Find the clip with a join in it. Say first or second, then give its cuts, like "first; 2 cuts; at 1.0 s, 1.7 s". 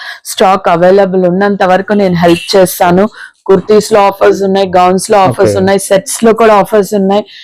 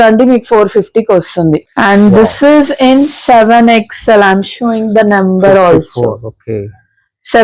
second; 1 cut; at 1.6 s